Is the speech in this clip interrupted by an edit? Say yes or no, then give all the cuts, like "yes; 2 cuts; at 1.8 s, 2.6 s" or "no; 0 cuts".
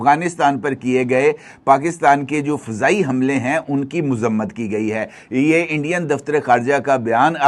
no; 0 cuts